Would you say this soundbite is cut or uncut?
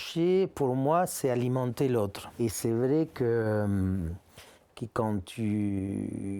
cut